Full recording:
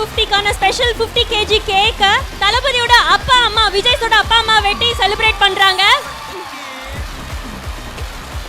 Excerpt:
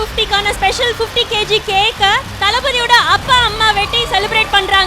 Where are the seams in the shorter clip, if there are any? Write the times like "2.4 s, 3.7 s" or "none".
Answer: 3.6 s